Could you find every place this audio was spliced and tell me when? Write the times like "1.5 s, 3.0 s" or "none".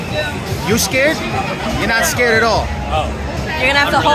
none